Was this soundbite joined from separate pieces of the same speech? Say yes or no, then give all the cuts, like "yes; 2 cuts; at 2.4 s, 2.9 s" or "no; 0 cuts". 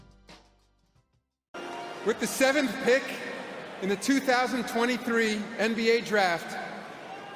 yes; 1 cut; at 1.5 s